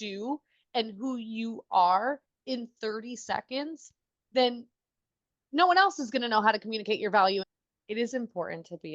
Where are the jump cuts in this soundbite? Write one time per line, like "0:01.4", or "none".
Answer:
0:07.5